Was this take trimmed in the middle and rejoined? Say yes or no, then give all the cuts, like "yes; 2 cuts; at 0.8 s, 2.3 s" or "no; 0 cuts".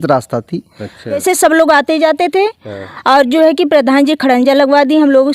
yes; 1 cut; at 1.2 s